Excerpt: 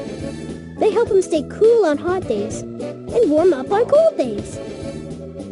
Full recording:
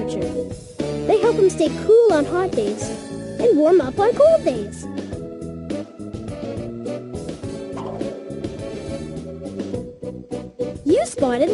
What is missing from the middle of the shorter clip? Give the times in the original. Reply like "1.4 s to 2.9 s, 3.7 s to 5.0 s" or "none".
4.6 s to 8.4 s